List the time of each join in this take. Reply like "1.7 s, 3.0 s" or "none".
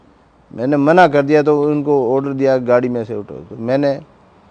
none